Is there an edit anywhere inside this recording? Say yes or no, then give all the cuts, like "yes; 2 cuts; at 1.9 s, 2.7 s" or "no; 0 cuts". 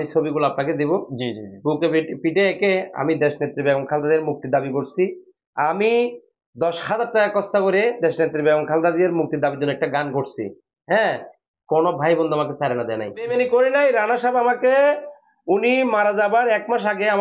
yes; 1 cut; at 13.3 s